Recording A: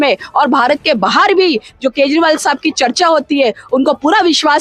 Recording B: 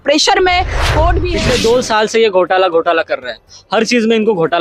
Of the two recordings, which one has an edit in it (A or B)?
B